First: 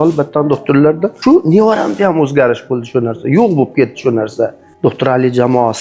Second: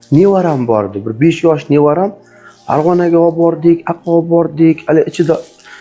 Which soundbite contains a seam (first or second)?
first